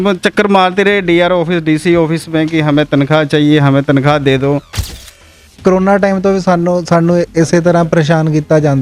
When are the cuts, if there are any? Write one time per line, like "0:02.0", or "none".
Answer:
0:05.1